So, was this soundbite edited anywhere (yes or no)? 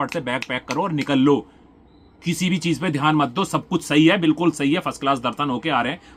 no